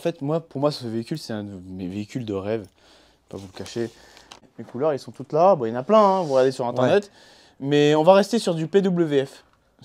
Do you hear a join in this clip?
yes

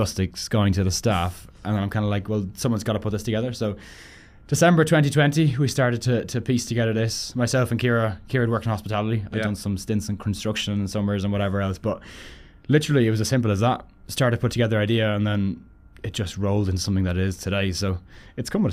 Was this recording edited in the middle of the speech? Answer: no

